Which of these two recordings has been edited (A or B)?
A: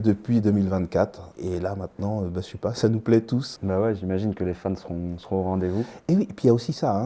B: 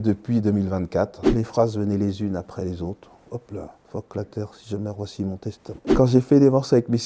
B